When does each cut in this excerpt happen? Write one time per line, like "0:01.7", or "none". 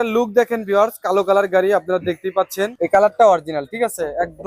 0:02.7

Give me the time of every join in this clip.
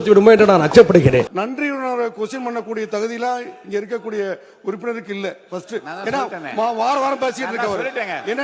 0:01.3

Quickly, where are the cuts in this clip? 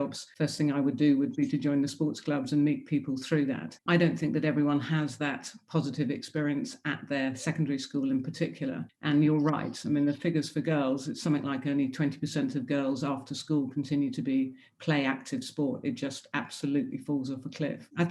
0:03.8

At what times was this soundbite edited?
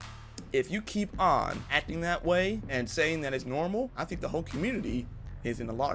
0:01.6
0:02.6
0:04.0

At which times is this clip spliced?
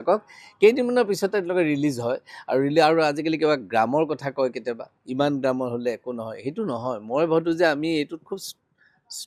none

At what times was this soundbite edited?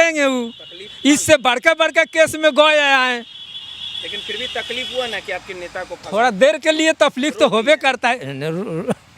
none

